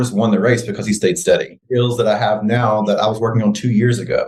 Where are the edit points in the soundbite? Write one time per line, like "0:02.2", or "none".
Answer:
none